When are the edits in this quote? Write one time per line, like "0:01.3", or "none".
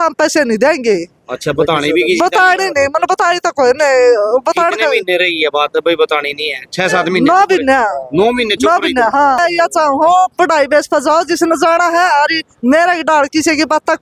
0:09.4